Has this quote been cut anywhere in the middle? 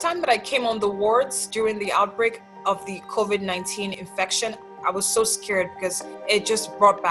no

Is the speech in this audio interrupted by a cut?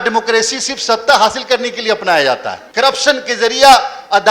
yes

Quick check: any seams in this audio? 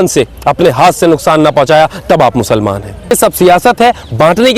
yes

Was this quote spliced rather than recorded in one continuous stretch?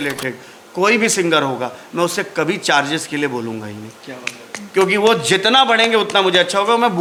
no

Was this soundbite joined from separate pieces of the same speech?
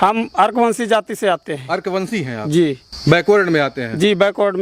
no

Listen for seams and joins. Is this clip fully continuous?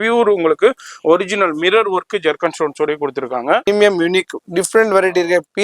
no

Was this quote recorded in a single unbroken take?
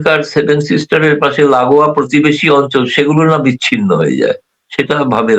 yes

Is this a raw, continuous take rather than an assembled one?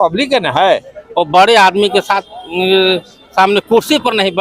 no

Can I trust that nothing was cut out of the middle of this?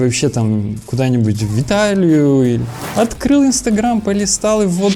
yes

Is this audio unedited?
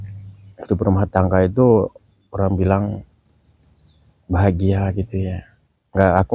yes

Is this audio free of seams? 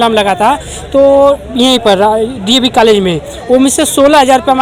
yes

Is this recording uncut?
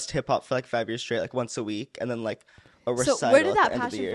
yes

